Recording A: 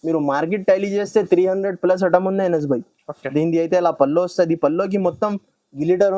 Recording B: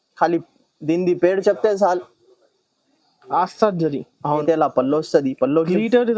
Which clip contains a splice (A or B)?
B